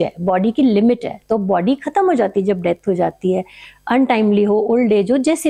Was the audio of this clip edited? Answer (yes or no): no